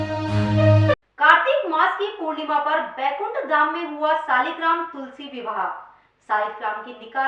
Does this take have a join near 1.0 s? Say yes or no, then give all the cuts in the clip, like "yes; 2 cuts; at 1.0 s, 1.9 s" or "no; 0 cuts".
yes; 1 cut; at 1.0 s